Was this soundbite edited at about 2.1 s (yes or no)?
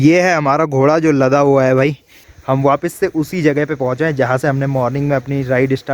yes